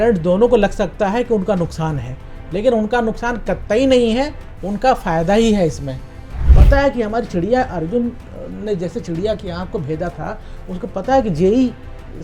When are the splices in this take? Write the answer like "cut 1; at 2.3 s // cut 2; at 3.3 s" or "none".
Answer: cut 1; at 6.5 s